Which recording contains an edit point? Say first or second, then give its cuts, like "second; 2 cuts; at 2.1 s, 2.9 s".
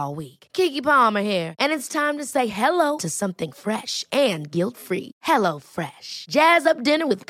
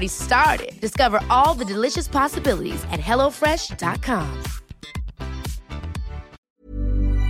second; 1 cut; at 6.4 s